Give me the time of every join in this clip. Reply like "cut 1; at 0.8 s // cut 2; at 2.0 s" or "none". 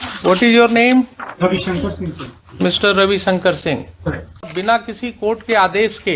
cut 1; at 4.5 s